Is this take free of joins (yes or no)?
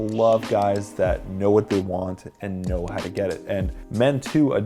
yes